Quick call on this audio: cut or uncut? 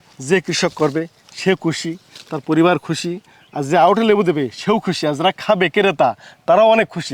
uncut